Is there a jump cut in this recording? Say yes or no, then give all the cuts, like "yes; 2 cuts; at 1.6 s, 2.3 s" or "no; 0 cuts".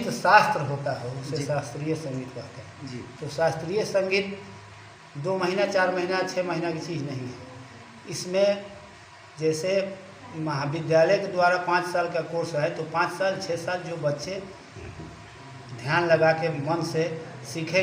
no; 0 cuts